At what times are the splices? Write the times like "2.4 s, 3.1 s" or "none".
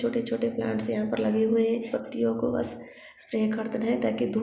1.9 s